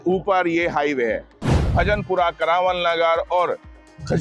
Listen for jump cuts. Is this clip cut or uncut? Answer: cut